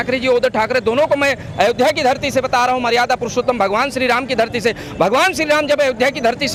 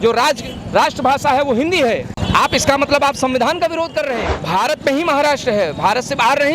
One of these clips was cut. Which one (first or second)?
second